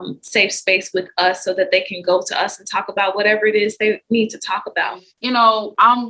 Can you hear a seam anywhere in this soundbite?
yes; 1 cut; at 5.1 s

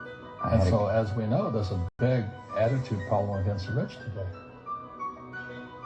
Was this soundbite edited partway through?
no; 0 cuts

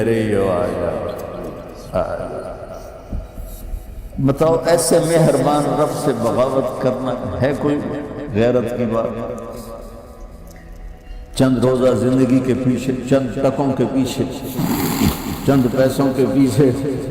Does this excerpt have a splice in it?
yes; 1 cut; at 4.1 s

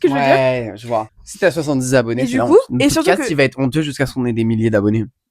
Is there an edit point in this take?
yes; 1 cut; at 1.1 s

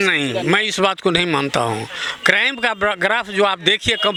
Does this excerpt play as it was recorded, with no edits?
yes; 0 cuts

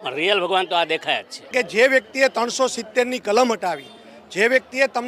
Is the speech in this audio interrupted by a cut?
yes; 1 cut; at 1.5 s

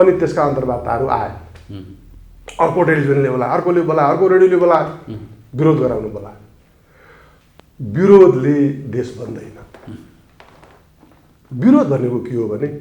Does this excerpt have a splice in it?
no; 0 cuts

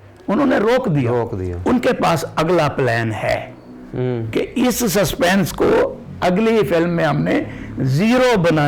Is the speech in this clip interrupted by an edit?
no; 0 cuts

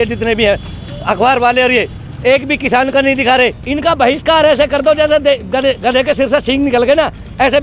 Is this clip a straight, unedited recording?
no; 1 cut; at 3.6 s

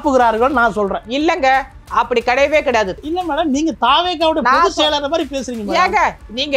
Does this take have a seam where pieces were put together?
yes; 1 cut; at 2.9 s

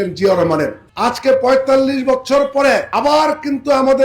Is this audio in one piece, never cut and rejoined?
no; 2 cuts; at 0.9 s, 2.9 s

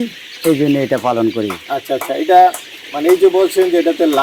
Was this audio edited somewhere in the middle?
no; 0 cuts

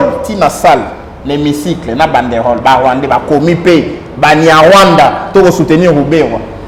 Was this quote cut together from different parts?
no; 0 cuts

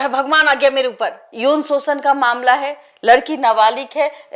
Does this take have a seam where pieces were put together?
yes; 1 cut; at 1.2 s

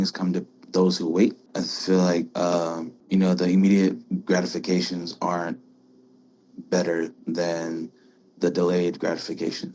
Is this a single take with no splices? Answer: no; 2 cuts; at 1.4 s, 2.9 s

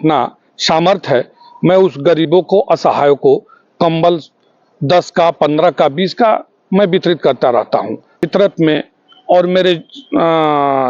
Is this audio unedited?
no; 1 cut; at 8.2 s

